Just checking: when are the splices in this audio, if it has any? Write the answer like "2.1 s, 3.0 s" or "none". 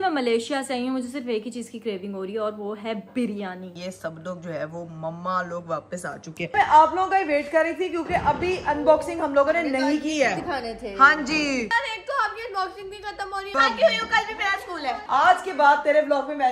3.7 s, 6.5 s, 11.7 s, 13.5 s, 15.0 s